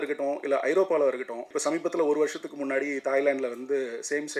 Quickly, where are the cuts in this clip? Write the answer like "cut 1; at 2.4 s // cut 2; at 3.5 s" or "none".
cut 1; at 1.5 s